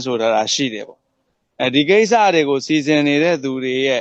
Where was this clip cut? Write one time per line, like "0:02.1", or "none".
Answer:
0:01.9